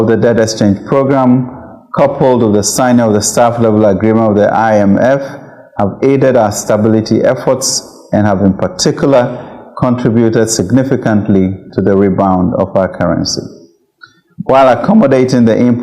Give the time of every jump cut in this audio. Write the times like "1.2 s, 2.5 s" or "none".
none